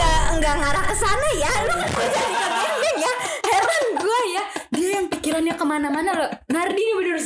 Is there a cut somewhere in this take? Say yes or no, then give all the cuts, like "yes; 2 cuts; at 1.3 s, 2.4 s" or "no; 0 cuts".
no; 0 cuts